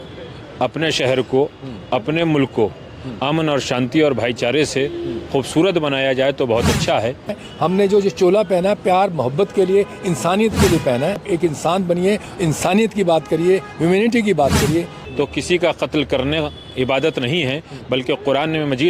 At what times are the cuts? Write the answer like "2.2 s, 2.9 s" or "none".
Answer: 7.4 s, 11.2 s, 15.0 s